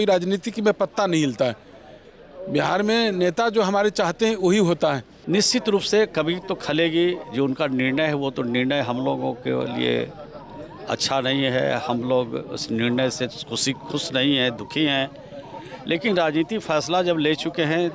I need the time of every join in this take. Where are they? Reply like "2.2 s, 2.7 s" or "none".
5.1 s